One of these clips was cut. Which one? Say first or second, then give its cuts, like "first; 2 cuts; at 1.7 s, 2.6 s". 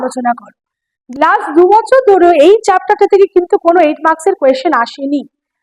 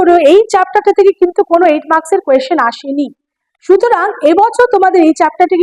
first; 1 cut; at 1.0 s